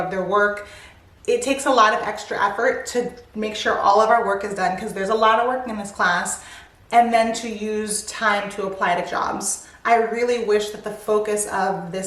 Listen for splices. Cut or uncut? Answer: uncut